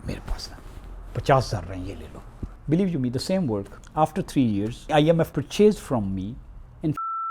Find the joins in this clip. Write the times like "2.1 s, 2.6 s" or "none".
2.5 s, 3.8 s, 5.3 s

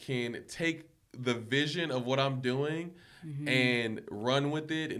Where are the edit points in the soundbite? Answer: none

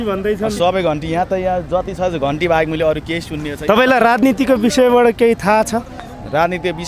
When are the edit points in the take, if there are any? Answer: none

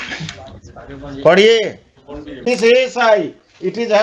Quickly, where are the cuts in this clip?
2.4 s

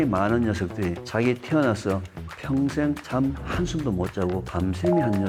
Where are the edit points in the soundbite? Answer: none

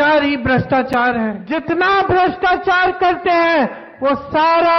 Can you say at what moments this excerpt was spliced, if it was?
1.5 s

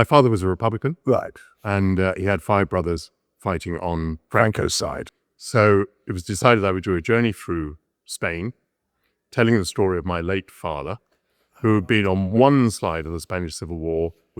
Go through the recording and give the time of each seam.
5.1 s

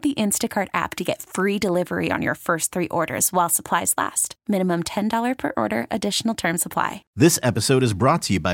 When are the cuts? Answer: 7.0 s

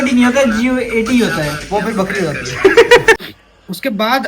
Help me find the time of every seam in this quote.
3.2 s

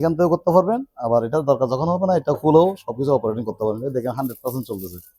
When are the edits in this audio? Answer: none

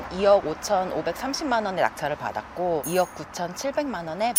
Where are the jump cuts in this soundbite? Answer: none

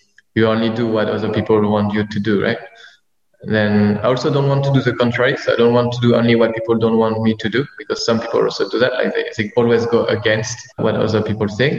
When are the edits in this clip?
10.8 s

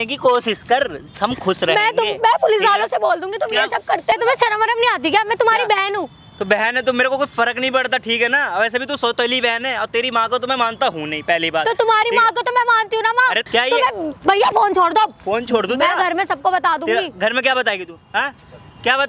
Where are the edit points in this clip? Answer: 4.1 s, 13.4 s

